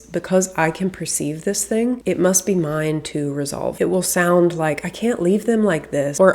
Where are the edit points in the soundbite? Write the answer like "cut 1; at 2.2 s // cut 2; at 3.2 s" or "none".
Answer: cut 1; at 3.7 s